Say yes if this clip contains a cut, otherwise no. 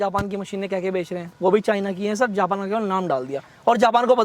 no